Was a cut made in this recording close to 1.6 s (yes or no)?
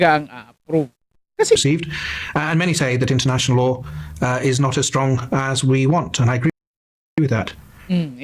yes